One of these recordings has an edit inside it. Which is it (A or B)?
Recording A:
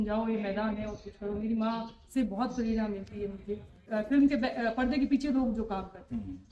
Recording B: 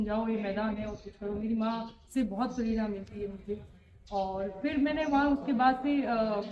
A